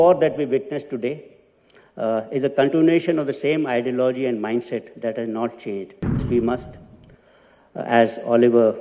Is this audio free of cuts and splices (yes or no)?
no